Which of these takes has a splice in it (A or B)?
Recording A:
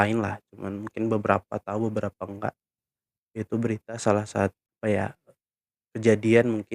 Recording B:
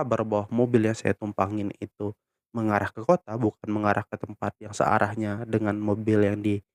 A